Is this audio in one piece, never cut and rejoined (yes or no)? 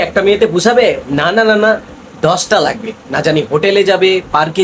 yes